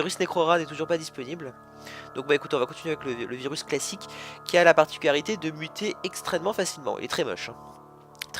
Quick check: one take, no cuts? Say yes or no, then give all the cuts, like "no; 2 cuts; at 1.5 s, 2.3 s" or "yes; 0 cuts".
no; 1 cut; at 1.8 s